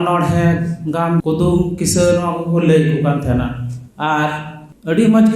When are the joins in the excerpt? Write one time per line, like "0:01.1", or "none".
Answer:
0:01.2